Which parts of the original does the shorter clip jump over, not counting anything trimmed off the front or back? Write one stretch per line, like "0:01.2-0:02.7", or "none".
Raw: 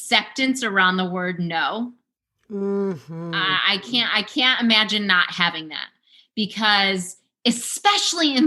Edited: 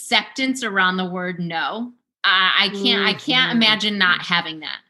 0:02.2-0:03.3